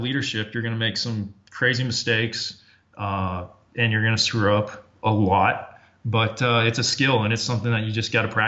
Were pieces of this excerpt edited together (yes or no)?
no